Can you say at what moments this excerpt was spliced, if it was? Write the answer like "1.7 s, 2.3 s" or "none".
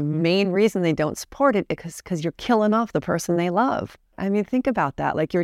4.2 s